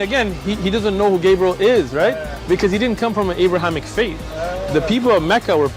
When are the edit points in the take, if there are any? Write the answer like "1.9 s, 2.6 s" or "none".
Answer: none